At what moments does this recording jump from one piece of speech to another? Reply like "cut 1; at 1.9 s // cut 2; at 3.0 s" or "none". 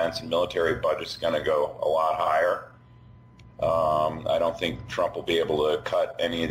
cut 1; at 1.7 s